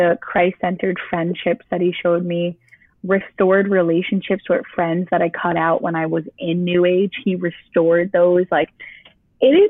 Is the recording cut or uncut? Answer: uncut